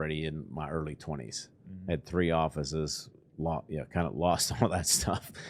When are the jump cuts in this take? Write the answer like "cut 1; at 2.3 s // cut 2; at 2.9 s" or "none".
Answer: none